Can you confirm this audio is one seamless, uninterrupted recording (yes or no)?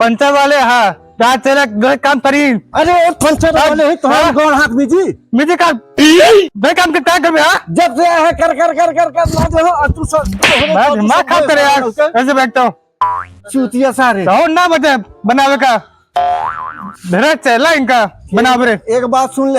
no